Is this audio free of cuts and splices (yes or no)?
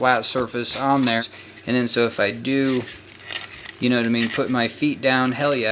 no